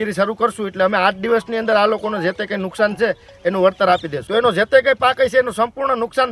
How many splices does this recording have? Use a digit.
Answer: 1